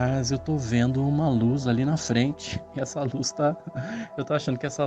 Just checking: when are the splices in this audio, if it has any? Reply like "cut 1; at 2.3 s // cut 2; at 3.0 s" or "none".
none